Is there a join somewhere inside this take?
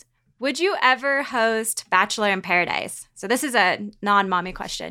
no; 0 cuts

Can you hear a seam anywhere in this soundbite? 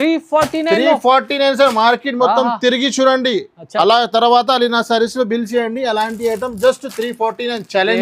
no; 0 cuts

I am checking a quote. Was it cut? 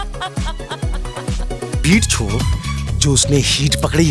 yes; 1 cut; at 1.8 s

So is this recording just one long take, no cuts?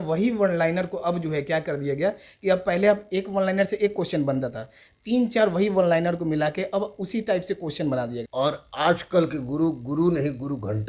no; 1 cut; at 8.2 s

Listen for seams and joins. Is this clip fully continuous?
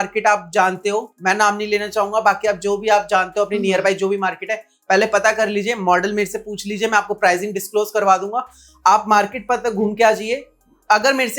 yes; 0 cuts

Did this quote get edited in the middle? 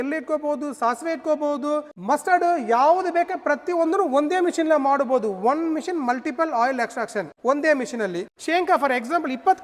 yes; 2 cuts; at 1.9 s, 8.2 s

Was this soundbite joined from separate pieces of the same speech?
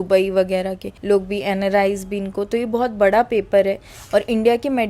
no; 0 cuts

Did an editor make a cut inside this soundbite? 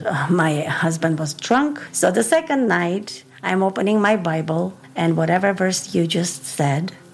yes; 2 cuts; at 1.8 s, 4.8 s

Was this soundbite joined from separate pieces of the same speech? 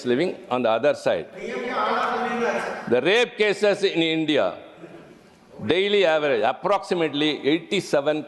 no; 0 cuts

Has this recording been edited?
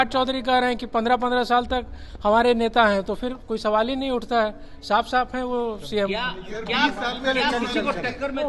no; 0 cuts

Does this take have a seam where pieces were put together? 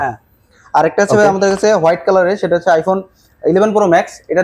no; 0 cuts

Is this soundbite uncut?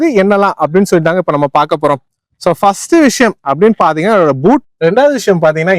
no; 1 cut; at 4.6 s

